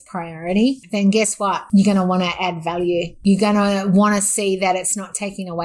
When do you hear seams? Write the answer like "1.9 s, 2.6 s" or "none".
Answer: 1.6 s, 3.1 s